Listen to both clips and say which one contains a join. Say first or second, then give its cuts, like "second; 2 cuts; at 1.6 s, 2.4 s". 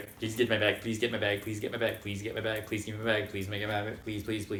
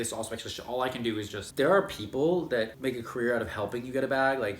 second; 2 cuts; at 1.4 s, 2.7 s